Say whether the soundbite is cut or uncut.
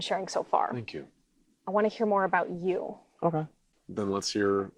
cut